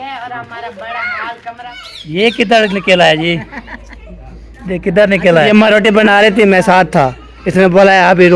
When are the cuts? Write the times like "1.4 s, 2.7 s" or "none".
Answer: 1.7 s, 5.5 s